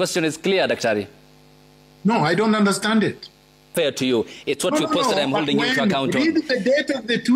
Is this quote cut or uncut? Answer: cut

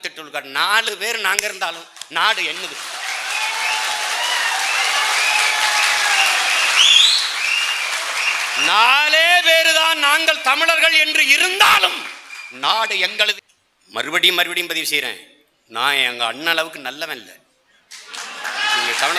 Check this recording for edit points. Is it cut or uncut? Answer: cut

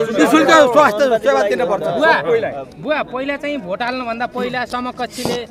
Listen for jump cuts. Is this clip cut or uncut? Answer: uncut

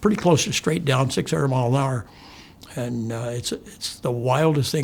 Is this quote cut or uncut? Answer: uncut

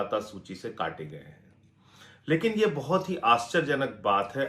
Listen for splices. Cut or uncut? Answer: uncut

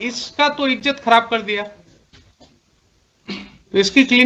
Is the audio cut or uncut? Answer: uncut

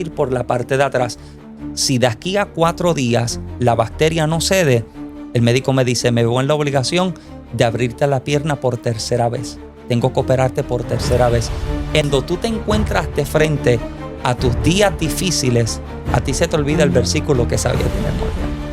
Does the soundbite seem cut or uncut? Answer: cut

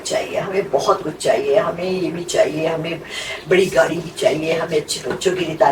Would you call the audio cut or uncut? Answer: uncut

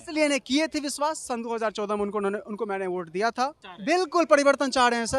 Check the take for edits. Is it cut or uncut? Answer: cut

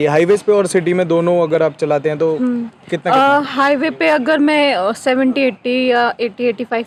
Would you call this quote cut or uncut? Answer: uncut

